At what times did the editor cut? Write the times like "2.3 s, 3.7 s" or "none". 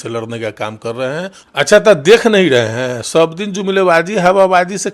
1.4 s